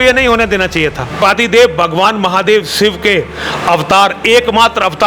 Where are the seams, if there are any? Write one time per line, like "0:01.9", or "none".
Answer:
0:01.2